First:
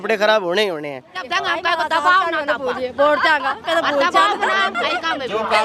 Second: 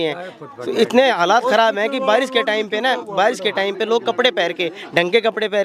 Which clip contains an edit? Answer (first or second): first